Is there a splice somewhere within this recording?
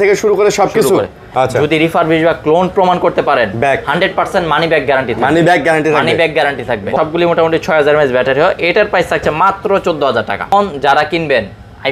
yes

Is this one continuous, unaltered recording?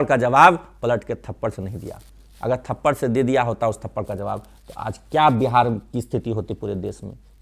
yes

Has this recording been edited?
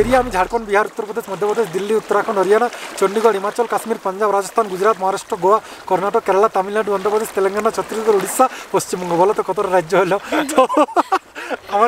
no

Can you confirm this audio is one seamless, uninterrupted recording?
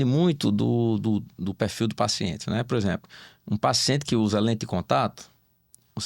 yes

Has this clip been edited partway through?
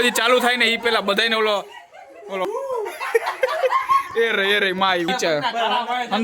yes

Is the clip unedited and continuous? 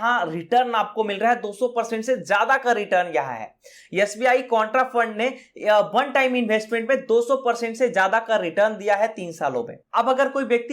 yes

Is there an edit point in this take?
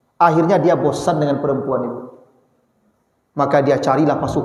no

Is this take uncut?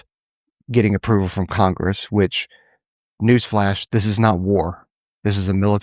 yes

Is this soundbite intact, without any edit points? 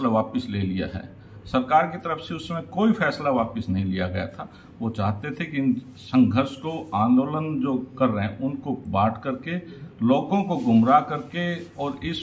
yes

